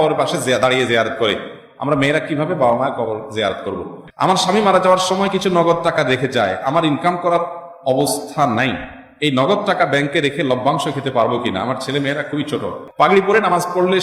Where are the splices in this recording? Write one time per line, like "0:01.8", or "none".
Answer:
0:04.0
0:12.8